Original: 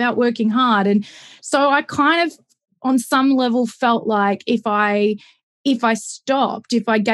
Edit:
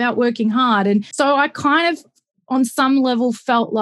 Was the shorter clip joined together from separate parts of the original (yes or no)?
yes